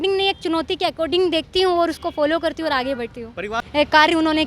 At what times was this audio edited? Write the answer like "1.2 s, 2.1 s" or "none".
3.6 s